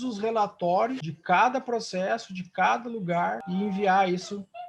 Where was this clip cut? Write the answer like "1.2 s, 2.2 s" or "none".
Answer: 1.1 s, 3.4 s